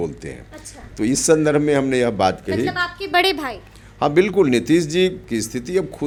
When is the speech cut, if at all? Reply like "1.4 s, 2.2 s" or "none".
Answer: none